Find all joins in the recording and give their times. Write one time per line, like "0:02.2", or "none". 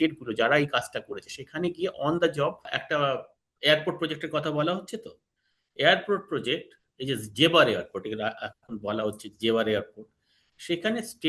0:02.7